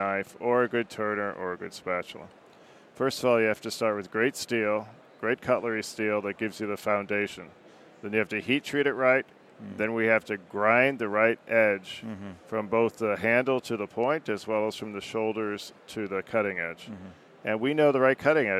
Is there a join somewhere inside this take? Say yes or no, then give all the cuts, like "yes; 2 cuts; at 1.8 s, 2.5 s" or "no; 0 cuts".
no; 0 cuts